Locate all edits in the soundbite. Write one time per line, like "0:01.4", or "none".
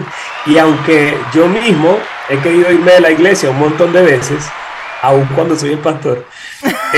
none